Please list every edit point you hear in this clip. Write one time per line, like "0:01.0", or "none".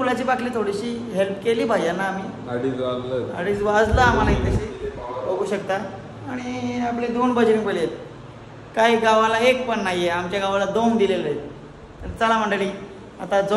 none